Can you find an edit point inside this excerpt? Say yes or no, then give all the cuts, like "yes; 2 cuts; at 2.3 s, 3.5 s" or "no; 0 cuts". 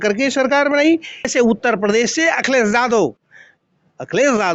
yes; 1 cut; at 1.1 s